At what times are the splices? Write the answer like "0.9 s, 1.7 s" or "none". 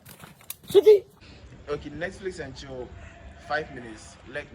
1.2 s